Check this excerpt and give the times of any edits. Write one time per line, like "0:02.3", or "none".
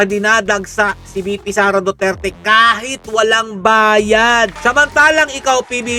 0:04.5